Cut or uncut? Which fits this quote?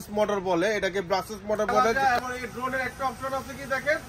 cut